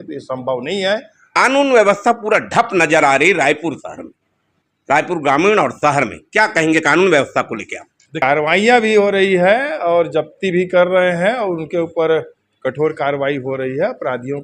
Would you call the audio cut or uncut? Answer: cut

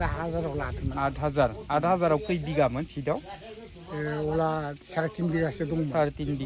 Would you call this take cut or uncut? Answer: uncut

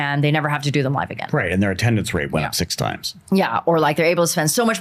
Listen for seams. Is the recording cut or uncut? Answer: uncut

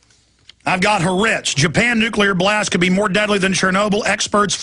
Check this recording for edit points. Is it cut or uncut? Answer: cut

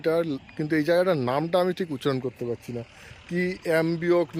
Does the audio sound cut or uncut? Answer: uncut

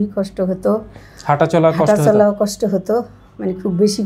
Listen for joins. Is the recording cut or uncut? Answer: uncut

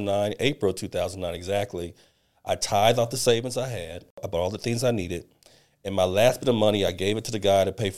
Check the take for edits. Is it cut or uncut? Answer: cut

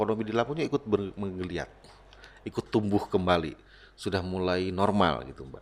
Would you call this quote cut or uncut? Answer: uncut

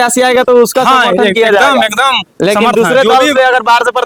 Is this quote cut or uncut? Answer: uncut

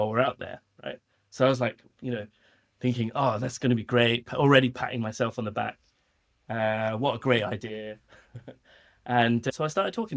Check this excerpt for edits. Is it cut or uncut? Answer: uncut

